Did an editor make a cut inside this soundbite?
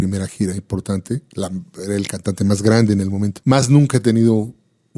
yes; 1 cut; at 3.4 s

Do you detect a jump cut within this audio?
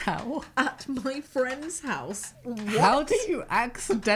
yes; 1 cut; at 2.3 s

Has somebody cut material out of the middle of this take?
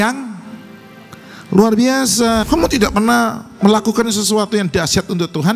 yes; 1 cut; at 2.5 s

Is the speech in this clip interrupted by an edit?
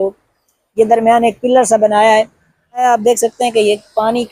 yes; 1 cut; at 2.8 s

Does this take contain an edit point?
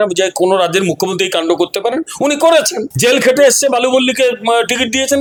no; 0 cuts

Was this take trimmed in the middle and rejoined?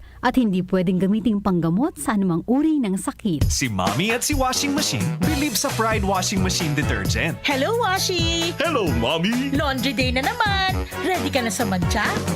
yes; 1 cut; at 3.4 s

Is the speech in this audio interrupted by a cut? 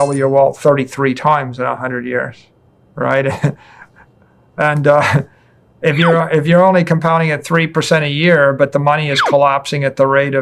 no; 0 cuts

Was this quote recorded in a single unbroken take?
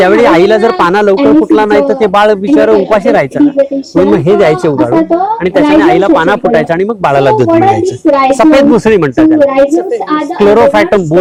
yes; 0 cuts

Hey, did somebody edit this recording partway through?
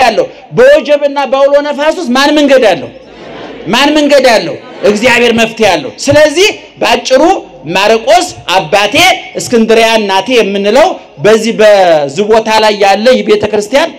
no; 0 cuts

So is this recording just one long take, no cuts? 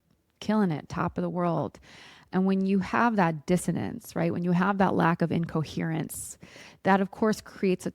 yes; 0 cuts

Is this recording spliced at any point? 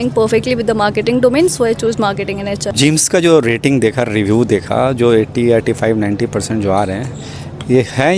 no; 0 cuts

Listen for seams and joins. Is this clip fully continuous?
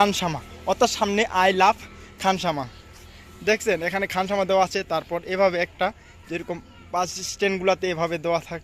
yes; 0 cuts

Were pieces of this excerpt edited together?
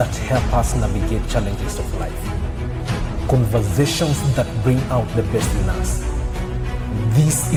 no; 0 cuts

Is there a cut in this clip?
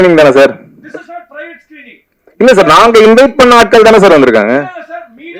no; 0 cuts

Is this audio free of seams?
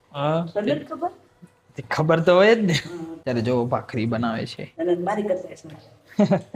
no; 1 cut; at 3.1 s

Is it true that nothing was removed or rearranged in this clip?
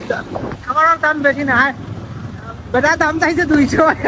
yes; 0 cuts

